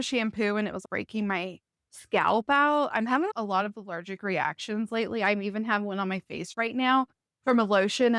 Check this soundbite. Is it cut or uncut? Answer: uncut